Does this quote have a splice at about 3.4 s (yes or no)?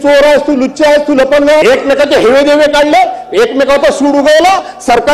no